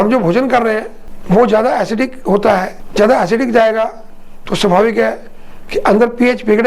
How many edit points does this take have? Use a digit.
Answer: 1